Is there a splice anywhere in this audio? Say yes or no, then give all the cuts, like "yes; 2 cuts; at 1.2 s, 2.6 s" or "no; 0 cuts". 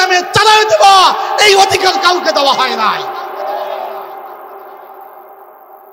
no; 0 cuts